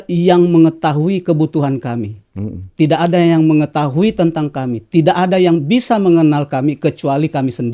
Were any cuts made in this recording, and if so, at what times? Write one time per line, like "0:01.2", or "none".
none